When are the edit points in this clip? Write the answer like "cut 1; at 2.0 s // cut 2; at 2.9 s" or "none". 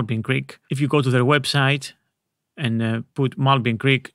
none